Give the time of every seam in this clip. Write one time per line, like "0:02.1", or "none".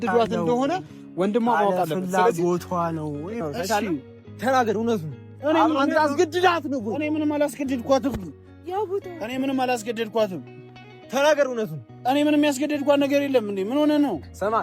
0:03.4

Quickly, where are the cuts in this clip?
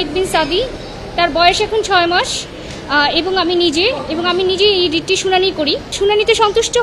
0:05.9

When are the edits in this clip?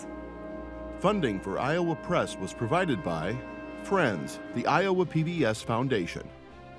0:01.0

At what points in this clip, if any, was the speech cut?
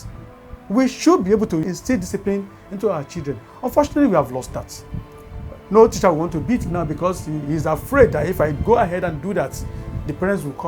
0:01.7

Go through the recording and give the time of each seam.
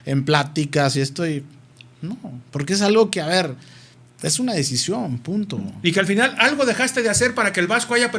none

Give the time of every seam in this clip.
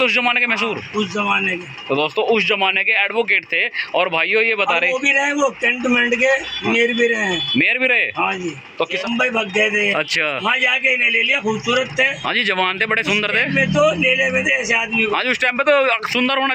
0:09.0

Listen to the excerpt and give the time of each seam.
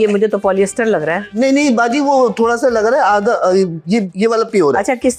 none

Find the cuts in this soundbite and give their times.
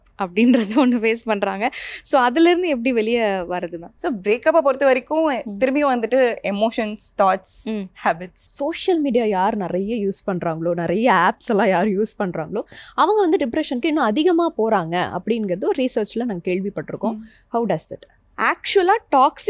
0:08.5
0:18.2

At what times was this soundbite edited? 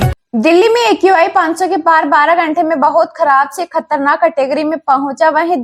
none

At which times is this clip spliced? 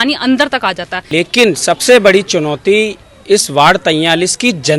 0:01.1

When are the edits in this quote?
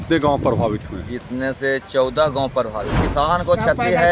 0:03.0

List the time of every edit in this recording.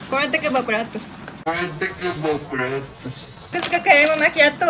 0:03.6

